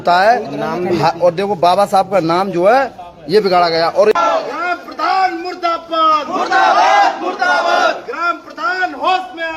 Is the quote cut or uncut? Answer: cut